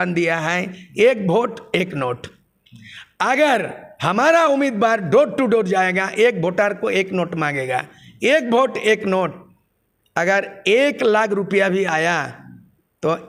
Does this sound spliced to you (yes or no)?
no